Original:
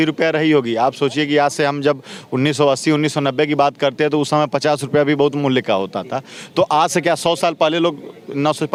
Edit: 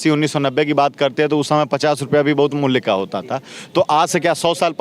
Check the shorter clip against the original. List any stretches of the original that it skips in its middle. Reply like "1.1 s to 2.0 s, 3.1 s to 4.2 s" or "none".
none